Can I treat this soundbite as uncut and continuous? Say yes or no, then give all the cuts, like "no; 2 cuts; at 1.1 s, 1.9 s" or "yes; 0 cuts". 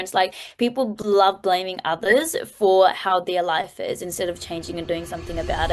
yes; 0 cuts